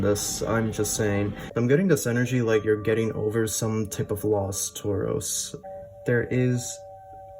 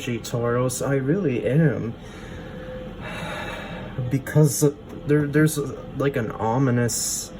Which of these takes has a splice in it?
first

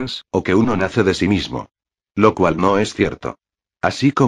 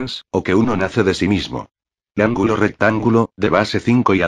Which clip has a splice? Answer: first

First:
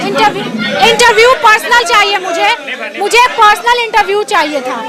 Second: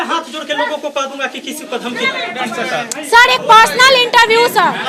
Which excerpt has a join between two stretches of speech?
second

